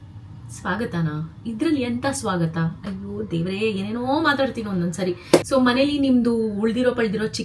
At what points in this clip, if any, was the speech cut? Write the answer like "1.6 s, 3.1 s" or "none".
5.5 s